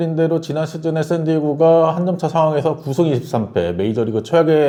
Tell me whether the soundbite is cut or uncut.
uncut